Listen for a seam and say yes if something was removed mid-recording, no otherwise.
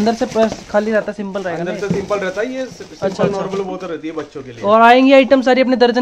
no